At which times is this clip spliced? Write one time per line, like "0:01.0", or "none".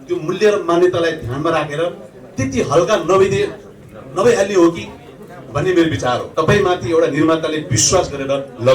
0:06.3